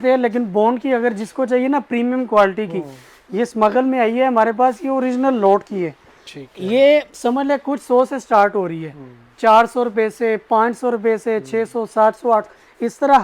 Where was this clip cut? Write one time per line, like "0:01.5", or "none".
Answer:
none